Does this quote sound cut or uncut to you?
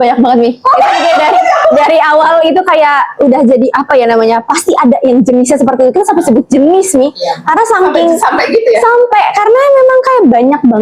uncut